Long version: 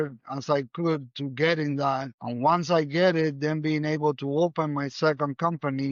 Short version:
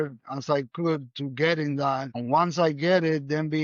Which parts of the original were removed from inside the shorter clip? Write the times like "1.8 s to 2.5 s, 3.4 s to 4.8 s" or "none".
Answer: 2.1 s to 2.2 s